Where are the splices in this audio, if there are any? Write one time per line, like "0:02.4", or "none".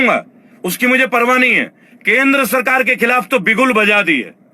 0:01.9